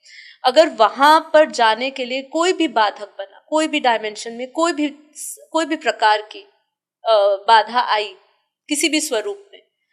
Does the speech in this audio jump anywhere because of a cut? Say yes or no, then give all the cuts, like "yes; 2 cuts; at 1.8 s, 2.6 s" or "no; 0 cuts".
no; 0 cuts